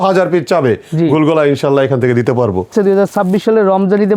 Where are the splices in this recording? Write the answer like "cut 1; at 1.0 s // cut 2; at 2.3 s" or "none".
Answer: cut 1; at 2.7 s